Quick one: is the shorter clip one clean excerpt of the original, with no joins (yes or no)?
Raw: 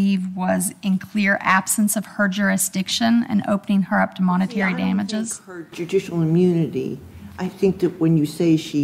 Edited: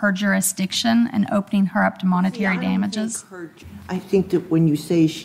no